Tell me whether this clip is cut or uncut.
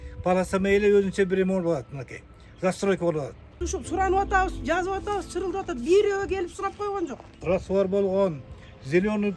cut